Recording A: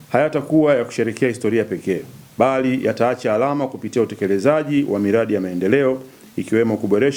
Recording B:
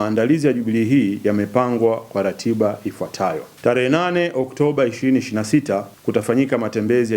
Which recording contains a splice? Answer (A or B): B